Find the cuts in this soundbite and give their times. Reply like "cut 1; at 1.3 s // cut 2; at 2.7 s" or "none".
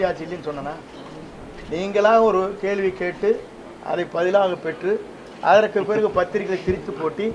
none